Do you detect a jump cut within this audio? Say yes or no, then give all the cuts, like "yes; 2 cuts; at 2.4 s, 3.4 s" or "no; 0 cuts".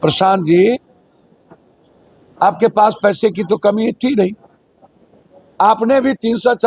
no; 0 cuts